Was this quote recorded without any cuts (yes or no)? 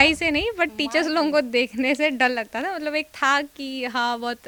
yes